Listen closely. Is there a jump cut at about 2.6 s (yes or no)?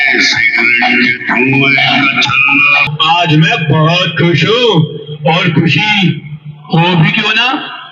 yes